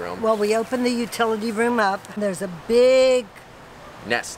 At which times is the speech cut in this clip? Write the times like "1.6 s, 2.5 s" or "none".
2.2 s